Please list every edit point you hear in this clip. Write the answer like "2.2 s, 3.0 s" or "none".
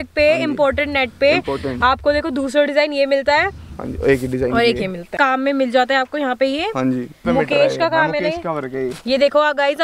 5.1 s, 7.1 s